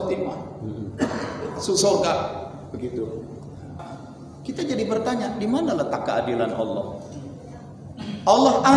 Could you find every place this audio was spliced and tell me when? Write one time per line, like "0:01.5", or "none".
0:03.9